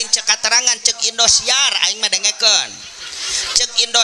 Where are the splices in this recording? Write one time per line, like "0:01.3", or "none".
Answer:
none